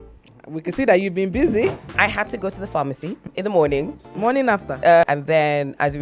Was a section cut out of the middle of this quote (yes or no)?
yes